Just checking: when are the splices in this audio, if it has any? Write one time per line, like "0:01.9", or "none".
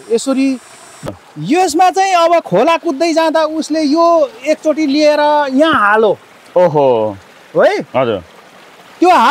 0:01.1